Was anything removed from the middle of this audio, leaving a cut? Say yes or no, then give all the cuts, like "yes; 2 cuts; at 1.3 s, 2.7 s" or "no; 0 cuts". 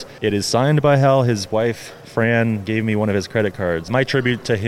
no; 0 cuts